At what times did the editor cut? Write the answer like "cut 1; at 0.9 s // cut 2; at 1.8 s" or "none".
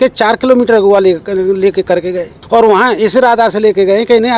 cut 1; at 2.3 s